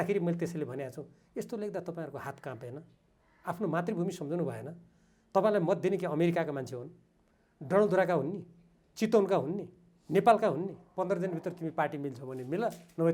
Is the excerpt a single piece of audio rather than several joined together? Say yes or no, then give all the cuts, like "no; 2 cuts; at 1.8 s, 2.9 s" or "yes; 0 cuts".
no; 1 cut; at 10.8 s